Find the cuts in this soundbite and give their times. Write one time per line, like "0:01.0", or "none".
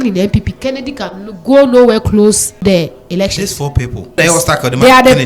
0:02.6
0:04.2